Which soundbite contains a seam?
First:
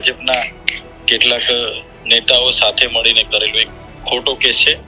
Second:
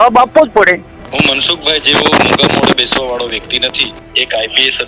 second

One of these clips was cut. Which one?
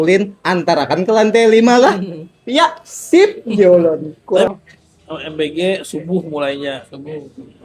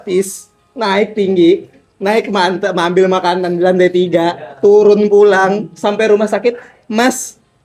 first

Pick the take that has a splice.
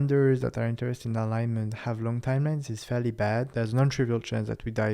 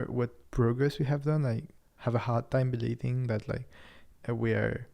first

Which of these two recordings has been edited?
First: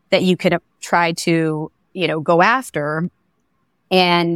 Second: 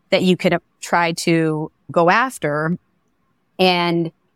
second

